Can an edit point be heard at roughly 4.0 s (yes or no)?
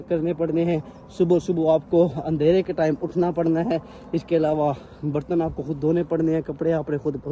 no